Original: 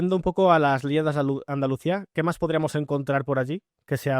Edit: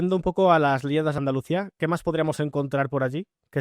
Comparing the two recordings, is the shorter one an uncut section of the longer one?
no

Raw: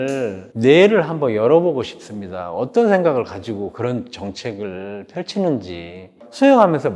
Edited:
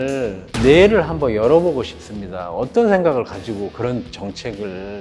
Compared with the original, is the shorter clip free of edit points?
yes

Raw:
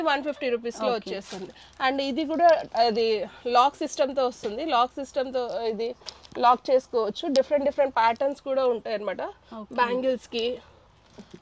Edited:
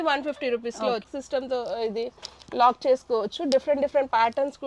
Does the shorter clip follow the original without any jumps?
no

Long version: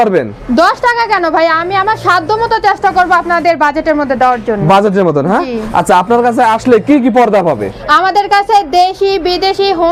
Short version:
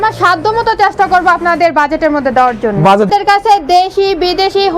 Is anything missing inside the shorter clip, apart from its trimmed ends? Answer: yes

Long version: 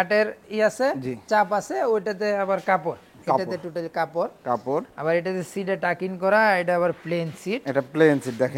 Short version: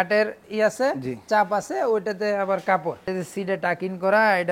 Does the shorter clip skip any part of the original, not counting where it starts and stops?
yes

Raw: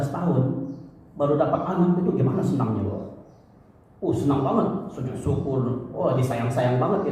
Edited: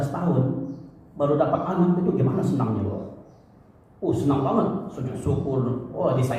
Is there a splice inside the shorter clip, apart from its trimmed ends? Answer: no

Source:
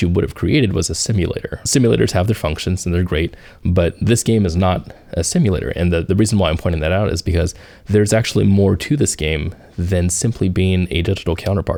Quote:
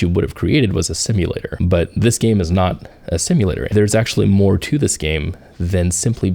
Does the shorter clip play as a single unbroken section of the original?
no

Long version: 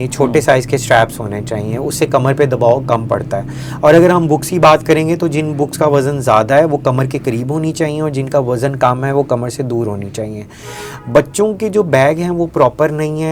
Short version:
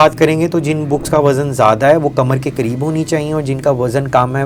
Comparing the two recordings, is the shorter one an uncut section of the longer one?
yes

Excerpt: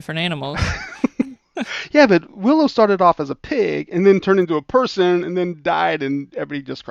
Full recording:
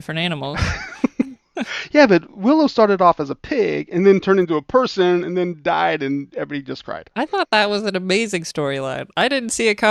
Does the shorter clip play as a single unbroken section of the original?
yes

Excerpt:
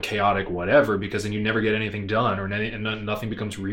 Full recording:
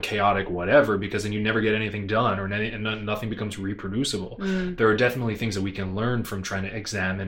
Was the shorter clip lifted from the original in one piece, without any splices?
yes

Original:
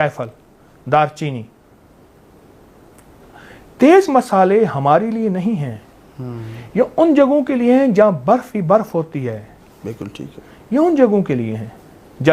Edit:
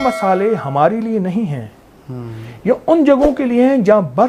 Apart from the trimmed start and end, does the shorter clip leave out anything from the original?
no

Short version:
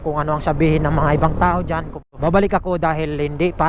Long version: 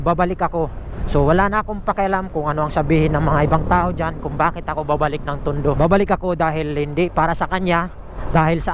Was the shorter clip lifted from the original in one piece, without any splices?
no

